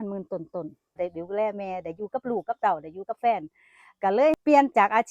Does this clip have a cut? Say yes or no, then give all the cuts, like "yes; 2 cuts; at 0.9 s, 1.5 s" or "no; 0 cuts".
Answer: yes; 1 cut; at 1.0 s